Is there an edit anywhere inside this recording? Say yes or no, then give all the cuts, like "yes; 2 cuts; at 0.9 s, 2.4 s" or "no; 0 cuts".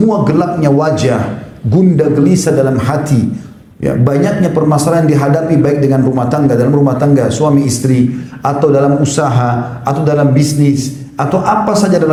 no; 0 cuts